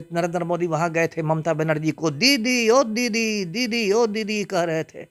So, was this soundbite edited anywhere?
no; 0 cuts

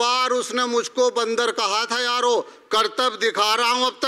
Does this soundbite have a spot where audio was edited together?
no; 0 cuts

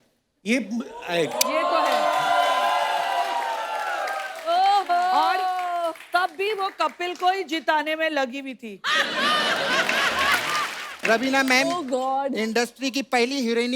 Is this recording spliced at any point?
yes; 1 cut; at 10.9 s

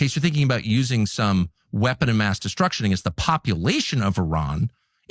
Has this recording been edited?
no; 0 cuts

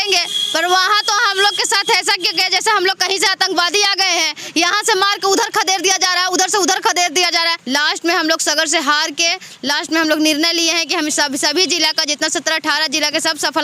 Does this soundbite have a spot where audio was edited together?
yes; 1 cut; at 7.6 s

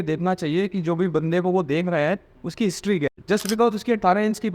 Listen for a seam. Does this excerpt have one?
yes; 1 cut; at 3.1 s

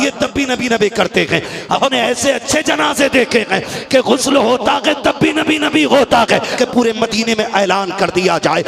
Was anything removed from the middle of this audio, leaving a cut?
yes; 1 cut; at 6.5 s

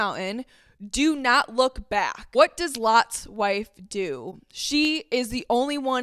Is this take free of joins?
yes; 0 cuts

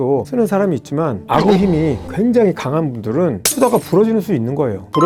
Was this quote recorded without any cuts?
yes; 0 cuts

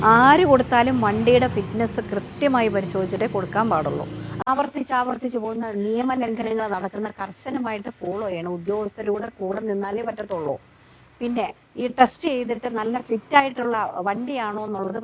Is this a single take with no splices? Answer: no; 1 cut; at 4.5 s

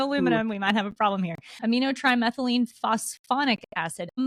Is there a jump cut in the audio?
no; 0 cuts

